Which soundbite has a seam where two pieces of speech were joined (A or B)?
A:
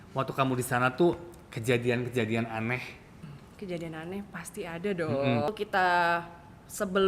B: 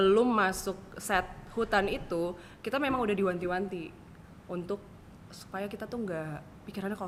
A